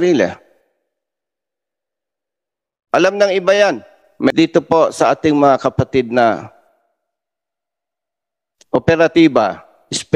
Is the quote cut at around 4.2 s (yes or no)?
yes